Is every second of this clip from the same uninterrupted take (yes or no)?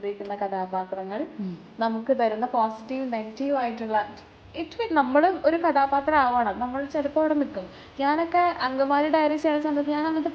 yes